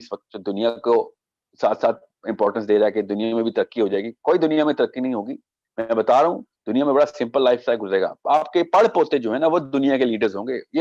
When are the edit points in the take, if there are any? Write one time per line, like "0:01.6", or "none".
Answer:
none